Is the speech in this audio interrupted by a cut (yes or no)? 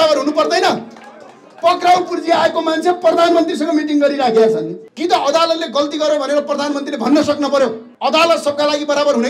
yes